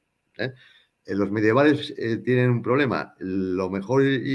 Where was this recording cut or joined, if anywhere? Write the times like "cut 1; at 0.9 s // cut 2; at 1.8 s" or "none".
none